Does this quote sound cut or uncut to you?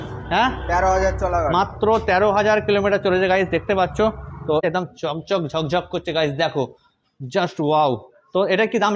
cut